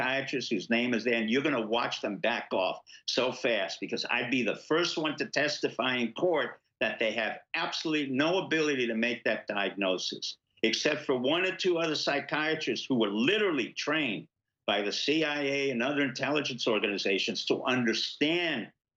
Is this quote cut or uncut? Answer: uncut